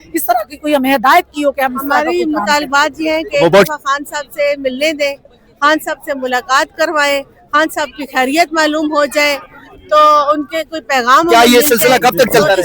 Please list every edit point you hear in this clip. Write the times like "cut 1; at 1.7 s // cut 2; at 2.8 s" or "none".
cut 1; at 1.8 s // cut 2; at 11.3 s